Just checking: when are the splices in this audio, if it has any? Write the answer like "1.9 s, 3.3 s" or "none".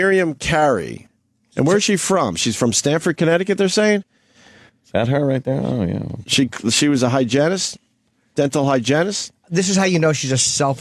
1.7 s